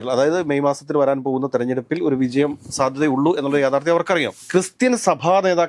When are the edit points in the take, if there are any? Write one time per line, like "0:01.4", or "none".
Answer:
0:04.4